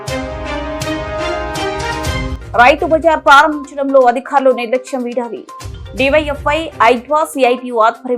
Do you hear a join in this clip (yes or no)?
yes